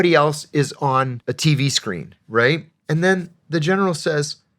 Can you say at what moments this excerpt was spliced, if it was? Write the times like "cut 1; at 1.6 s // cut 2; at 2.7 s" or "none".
cut 1; at 1.2 s // cut 2; at 2.7 s